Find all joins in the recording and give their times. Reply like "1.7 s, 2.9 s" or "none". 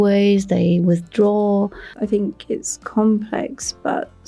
1.9 s

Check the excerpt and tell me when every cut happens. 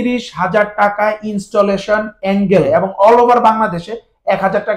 2.7 s

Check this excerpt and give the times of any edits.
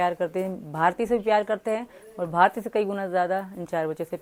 none

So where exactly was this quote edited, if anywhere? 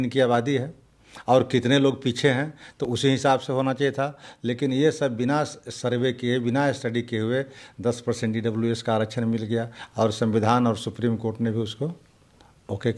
none

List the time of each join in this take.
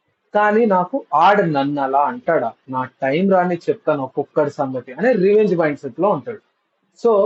none

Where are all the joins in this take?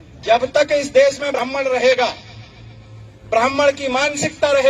1.4 s

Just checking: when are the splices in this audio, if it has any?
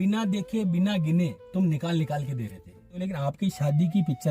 3.0 s

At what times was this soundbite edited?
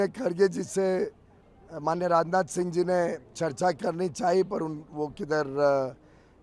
none

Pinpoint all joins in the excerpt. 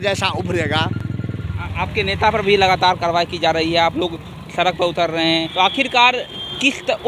none

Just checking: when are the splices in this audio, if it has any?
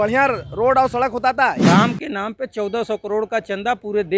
1.6 s

